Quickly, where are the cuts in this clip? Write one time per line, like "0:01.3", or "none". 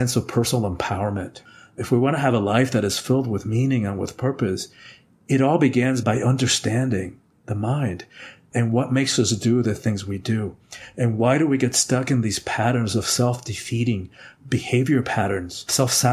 0:01.4